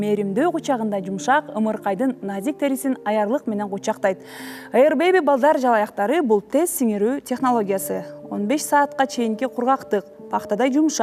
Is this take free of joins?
yes; 0 cuts

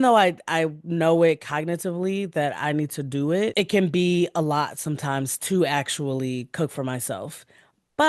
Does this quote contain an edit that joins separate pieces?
yes; 1 cut; at 3.5 s

